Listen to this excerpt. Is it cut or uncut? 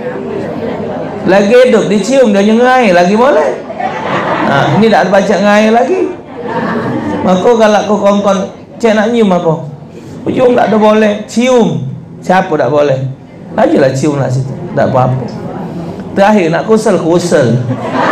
uncut